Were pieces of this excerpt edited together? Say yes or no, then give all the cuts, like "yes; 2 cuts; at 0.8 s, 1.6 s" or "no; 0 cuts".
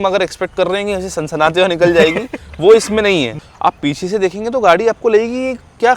yes; 1 cut; at 3.3 s